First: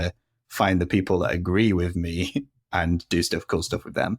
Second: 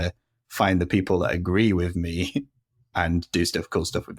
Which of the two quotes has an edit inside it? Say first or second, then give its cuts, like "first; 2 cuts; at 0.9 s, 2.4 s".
first; 1 cut; at 2.6 s